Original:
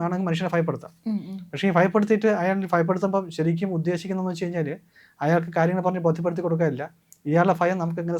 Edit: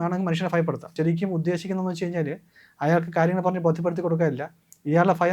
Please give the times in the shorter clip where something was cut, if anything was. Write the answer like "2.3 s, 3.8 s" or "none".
0.9 s